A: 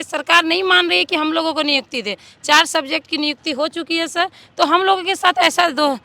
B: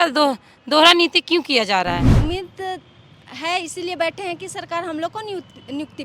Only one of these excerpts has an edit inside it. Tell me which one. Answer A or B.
B